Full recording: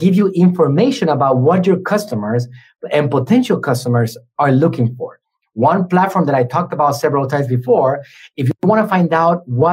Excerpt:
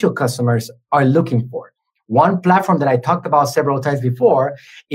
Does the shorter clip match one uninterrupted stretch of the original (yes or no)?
yes